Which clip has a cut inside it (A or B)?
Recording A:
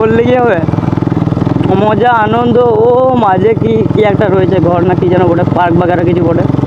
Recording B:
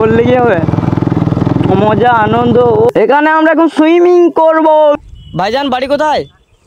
B